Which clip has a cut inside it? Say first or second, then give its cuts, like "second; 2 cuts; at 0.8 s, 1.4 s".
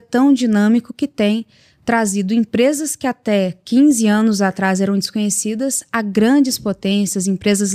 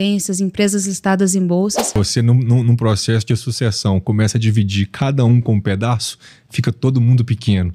second; 1 cut; at 1.9 s